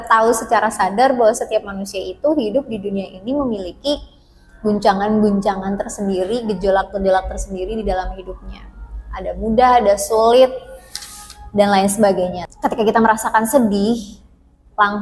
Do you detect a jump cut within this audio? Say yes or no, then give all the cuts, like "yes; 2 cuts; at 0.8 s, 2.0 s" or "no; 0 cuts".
yes; 1 cut; at 12.4 s